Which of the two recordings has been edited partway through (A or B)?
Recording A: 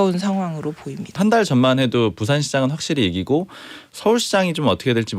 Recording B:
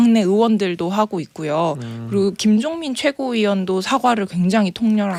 A